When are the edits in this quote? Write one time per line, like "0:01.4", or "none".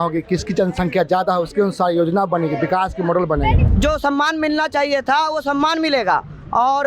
0:03.7